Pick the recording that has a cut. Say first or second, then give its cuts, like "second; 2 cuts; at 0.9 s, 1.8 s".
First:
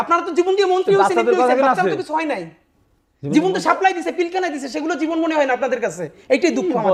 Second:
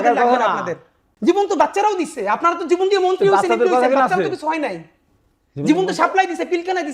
second; 1 cut; at 1.0 s